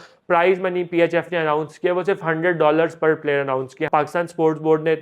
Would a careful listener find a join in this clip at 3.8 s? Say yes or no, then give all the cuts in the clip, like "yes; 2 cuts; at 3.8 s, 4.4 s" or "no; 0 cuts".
yes; 1 cut; at 3.8 s